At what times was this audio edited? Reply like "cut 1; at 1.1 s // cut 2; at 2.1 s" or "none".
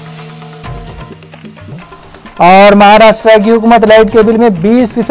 cut 1; at 1.6 s